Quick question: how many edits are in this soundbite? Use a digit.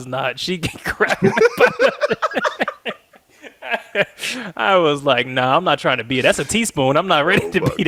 0